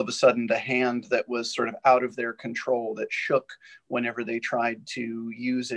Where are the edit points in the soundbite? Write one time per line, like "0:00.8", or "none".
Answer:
none